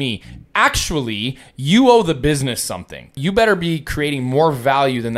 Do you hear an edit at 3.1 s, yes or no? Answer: yes